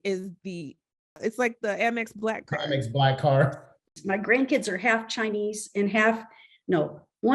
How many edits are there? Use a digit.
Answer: 2